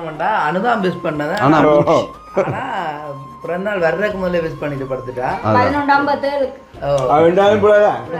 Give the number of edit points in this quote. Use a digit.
0